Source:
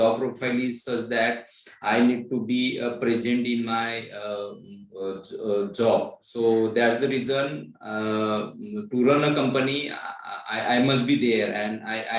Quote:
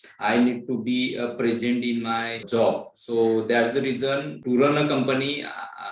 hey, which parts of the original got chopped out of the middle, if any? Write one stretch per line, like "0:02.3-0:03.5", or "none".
0:04.1-0:05.7
0:07.6-0:08.8

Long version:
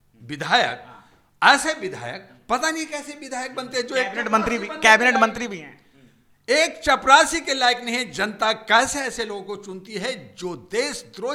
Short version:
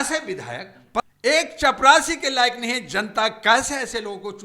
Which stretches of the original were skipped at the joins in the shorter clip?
0:02.6-0:06.3

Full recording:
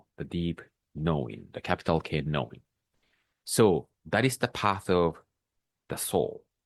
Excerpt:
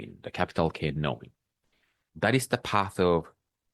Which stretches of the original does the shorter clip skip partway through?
0:03.3-0:03.9

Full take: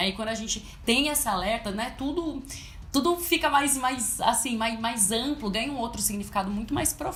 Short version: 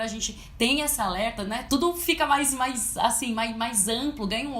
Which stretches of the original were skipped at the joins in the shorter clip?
0:01.9-0:02.9

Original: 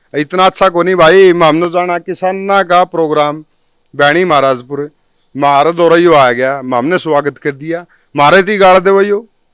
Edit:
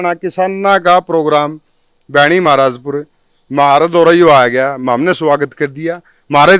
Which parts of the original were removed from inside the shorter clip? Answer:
none

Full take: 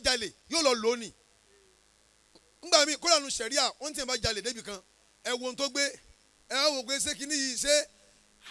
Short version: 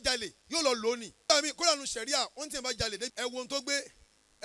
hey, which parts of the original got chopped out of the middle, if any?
0:01.1-0:02.6
0:04.6-0:05.2

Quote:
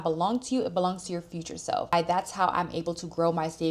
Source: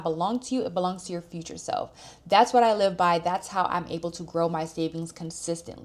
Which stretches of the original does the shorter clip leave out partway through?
0:01.9-0:03.1

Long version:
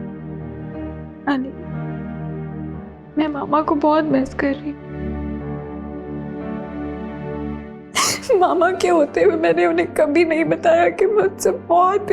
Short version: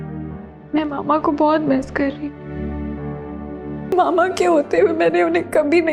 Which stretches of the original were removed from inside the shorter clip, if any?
0:06.4-0:08.4

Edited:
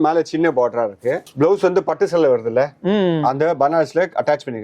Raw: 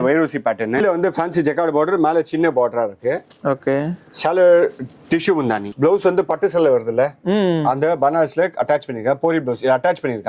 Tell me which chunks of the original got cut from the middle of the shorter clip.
0:03.3-0:05.7

